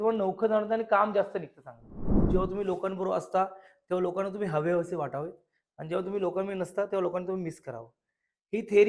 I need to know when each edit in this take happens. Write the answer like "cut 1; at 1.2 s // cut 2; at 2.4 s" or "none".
cut 1; at 2.1 s